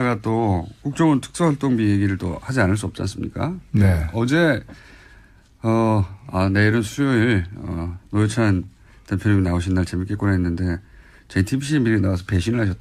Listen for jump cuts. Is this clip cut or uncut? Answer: uncut